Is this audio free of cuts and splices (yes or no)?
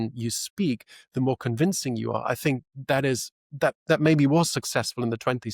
yes